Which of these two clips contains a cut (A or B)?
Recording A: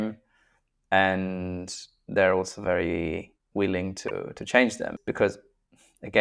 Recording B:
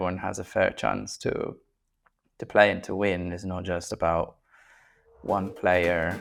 A